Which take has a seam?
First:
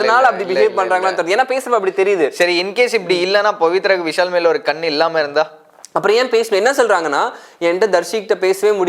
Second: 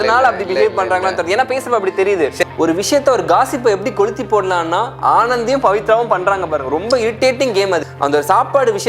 second; 2 cuts; at 2.4 s, 7.8 s

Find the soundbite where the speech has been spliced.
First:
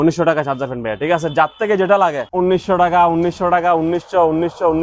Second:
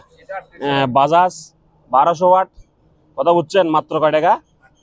first; 1 cut; at 2.2 s

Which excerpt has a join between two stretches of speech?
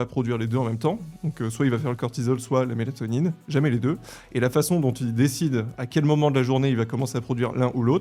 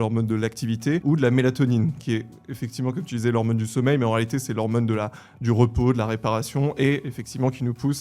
second; 1 cut; at 1.0 s

